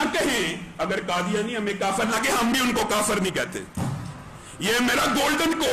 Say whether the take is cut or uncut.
uncut